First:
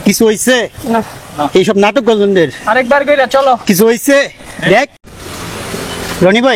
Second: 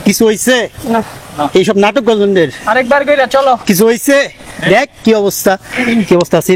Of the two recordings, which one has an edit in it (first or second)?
first